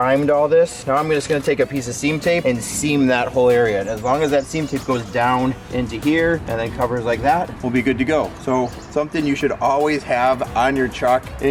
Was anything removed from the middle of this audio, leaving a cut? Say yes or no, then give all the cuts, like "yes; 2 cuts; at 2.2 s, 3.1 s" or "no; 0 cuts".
no; 0 cuts